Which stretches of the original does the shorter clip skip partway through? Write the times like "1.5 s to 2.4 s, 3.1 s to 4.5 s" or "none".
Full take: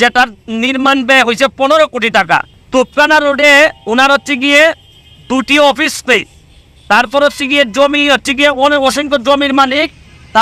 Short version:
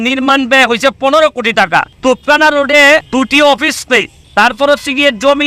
2.5 s to 2.6 s, 3.8 s to 5.2 s, 6.3 s to 6.7 s